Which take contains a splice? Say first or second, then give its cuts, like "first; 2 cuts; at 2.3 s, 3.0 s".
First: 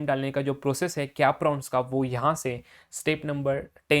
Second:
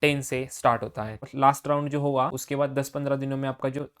second; 2 cuts; at 1.2 s, 2.4 s